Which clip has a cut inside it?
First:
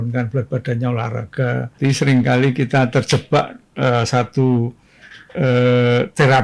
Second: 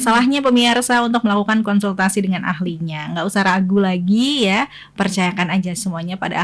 first; 1 cut; at 1.7 s

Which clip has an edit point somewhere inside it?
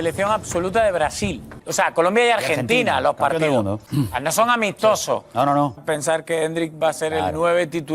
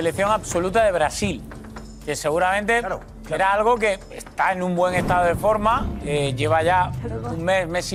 first; 3 cuts; at 1.6 s, 3.8 s, 5.8 s

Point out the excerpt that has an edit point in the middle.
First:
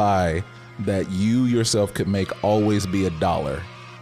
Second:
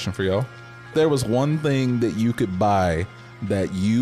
second; 1 cut; at 0.9 s

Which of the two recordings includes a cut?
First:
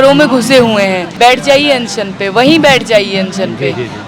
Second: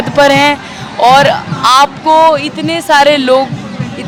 first; 1 cut; at 1.1 s

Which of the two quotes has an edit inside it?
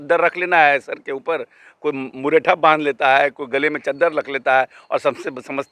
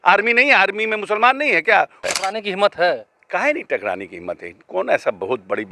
second; 1 cut; at 2.1 s

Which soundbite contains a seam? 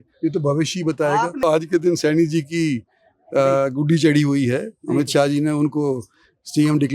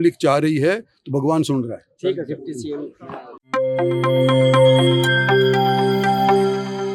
first; 1 cut; at 1.4 s

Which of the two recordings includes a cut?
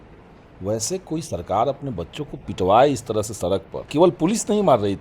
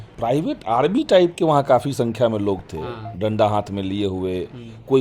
first; 1 cut; at 3.8 s

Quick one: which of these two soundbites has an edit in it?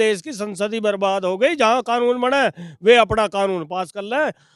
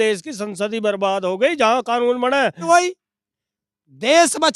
second; 1 cut; at 2.6 s

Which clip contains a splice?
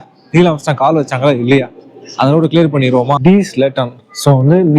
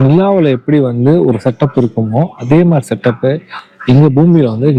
first; 1 cut; at 3.2 s

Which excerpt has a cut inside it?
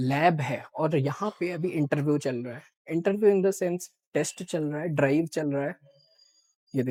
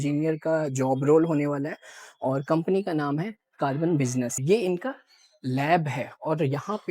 second; 1 cut; at 4.4 s

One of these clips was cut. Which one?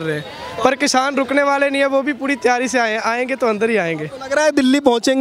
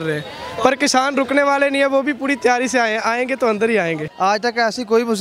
second; 1 cut; at 4.0 s

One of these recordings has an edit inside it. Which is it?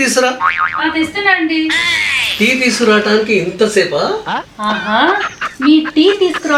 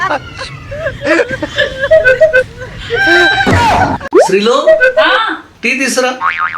second; 1 cut; at 4.0 s

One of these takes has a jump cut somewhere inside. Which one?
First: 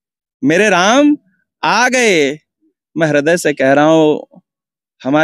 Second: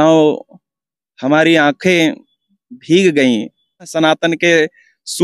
second; 1 cut; at 3.9 s

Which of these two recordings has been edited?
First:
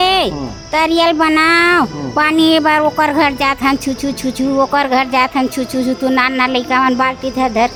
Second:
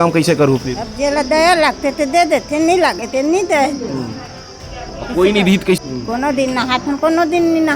second; 1 cut; at 5.8 s

